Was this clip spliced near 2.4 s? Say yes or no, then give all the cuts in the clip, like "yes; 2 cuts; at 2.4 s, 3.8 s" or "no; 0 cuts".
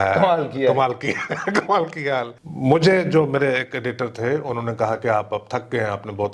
yes; 1 cut; at 2.4 s